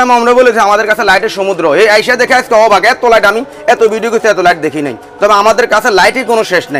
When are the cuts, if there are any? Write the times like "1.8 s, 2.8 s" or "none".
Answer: none